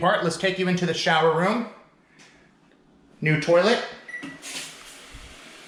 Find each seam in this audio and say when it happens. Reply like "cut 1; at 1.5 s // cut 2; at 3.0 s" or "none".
none